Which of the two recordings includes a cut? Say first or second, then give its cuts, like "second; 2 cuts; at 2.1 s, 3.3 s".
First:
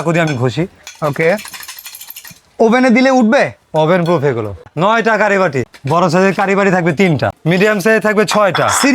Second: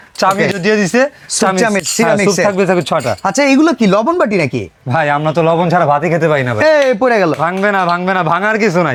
first; 3 cuts; at 4.7 s, 5.6 s, 7.3 s